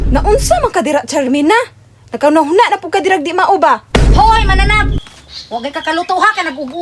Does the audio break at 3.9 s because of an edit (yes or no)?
yes